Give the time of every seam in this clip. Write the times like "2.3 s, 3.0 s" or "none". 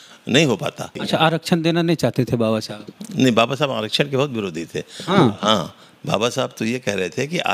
1.0 s